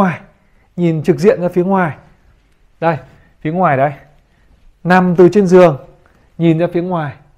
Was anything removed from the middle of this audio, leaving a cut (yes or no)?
no